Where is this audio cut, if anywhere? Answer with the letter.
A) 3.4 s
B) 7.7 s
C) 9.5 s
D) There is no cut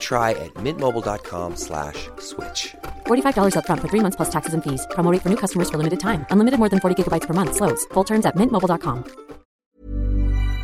C